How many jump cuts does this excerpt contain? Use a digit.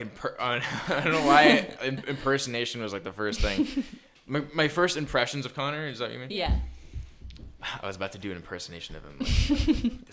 0